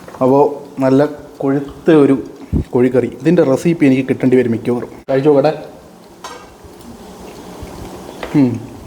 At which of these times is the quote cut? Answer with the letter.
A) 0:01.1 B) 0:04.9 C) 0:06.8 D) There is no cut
B